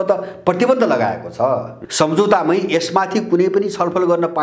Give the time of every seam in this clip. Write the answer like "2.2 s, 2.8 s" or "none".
1.8 s